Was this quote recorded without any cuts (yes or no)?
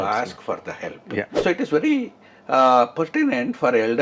no